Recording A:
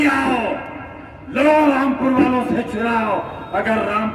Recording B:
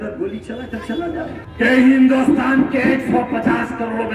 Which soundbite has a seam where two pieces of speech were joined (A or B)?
B